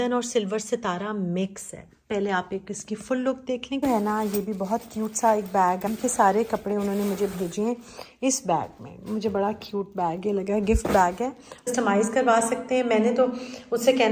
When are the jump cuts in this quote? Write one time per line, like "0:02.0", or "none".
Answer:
0:03.8
0:05.8
0:11.7